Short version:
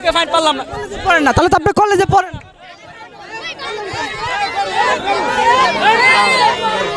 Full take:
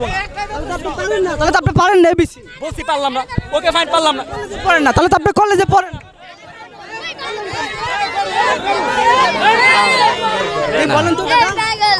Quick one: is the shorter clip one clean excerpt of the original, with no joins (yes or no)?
yes